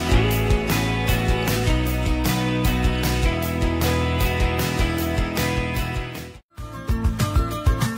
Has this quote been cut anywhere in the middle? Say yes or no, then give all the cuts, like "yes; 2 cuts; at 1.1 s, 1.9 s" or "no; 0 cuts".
no; 0 cuts